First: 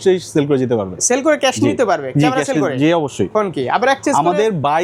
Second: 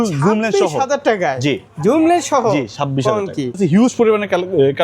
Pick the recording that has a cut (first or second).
second